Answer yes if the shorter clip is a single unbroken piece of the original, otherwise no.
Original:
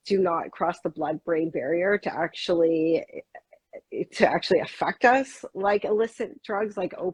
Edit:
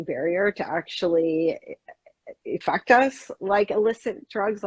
no